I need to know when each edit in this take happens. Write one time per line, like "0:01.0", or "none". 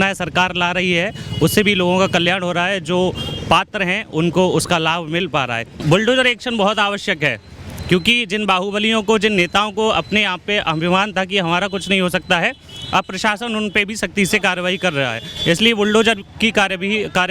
0:05.7